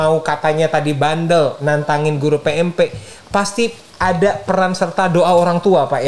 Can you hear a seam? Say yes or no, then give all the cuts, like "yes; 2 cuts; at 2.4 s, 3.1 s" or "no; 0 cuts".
no; 0 cuts